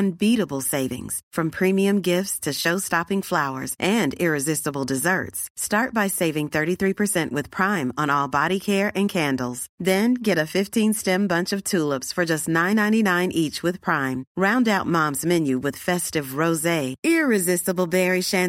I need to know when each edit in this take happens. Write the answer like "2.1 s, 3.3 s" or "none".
none

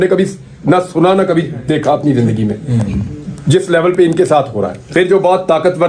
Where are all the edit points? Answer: 4.8 s

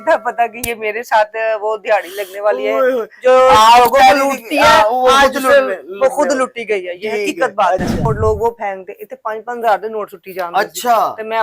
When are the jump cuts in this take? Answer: 8.0 s

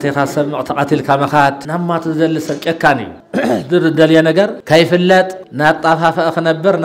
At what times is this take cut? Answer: 1.6 s, 3.2 s, 4.6 s, 5.4 s

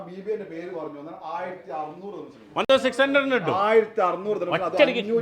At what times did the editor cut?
none

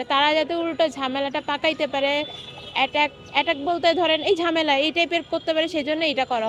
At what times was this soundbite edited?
none

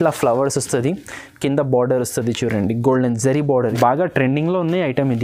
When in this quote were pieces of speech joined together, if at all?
3.7 s

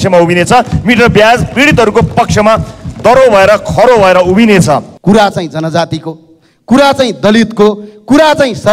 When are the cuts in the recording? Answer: 4.9 s

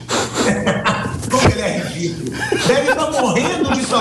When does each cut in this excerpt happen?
none

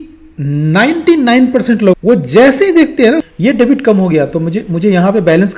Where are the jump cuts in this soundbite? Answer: 3.2 s

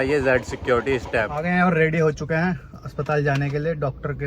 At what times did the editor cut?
1.4 s

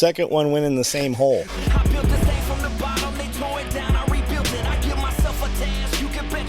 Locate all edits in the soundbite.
1.5 s

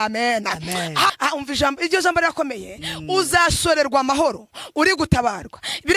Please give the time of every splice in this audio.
1.1 s

